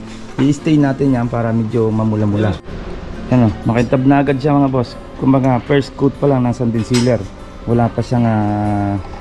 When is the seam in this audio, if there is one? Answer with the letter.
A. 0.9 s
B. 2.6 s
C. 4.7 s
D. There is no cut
B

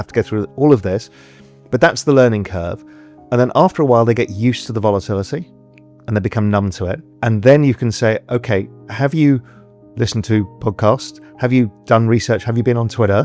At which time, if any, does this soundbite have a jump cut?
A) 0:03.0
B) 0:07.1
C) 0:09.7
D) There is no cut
B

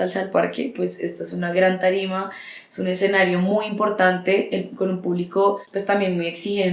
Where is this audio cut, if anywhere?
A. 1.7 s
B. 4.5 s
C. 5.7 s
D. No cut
C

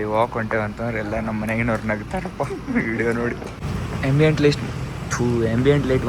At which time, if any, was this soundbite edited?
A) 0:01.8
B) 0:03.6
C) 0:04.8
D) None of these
B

